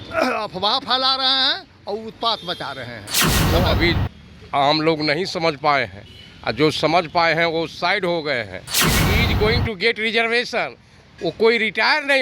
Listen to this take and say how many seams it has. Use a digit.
2